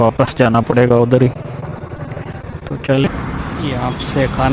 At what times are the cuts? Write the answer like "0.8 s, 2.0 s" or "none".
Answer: 3.1 s